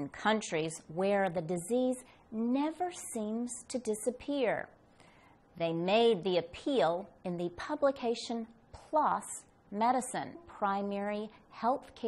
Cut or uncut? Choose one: uncut